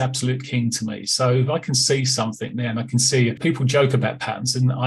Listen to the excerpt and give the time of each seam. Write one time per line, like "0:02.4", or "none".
0:03.4